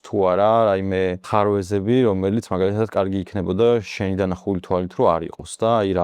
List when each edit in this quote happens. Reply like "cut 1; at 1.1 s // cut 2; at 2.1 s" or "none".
cut 1; at 1.2 s

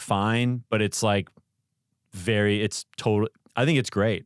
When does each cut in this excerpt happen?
none

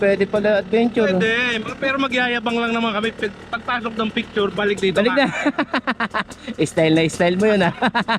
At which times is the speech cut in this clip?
none

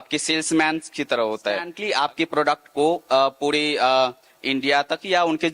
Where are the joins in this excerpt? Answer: cut 1; at 1.7 s

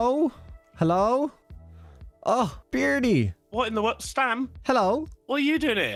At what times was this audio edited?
none

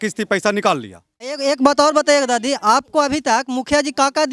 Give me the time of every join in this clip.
cut 1; at 1.3 s

